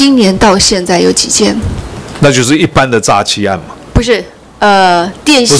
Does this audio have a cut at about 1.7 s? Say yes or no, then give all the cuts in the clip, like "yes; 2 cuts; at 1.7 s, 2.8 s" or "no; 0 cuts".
no; 0 cuts